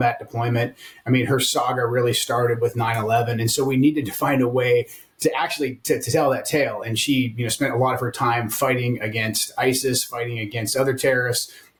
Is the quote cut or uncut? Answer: uncut